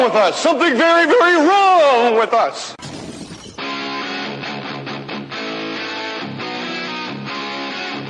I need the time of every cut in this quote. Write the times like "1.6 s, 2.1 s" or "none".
5.0 s